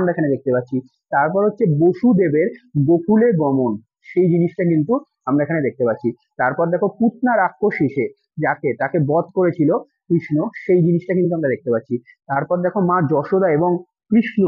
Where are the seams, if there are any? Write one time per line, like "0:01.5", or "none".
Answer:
none